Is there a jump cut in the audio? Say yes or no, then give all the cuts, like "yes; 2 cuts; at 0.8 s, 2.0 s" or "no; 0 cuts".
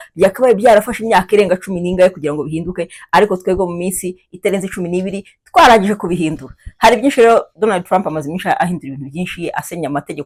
no; 0 cuts